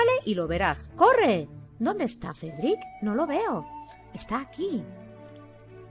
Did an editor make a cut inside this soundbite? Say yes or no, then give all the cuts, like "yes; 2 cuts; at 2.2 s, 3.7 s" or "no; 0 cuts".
yes; 1 cut; at 4.8 s